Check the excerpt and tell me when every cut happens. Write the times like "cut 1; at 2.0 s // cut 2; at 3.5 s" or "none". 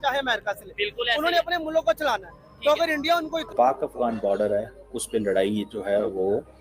cut 1; at 3.4 s